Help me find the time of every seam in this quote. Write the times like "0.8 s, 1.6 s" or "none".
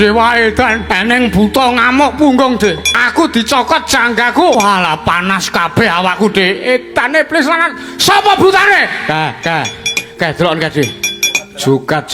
0.9 s, 2.9 s, 4.6 s